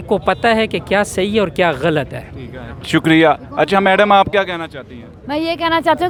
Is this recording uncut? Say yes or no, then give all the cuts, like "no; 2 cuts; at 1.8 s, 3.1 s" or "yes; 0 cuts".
yes; 0 cuts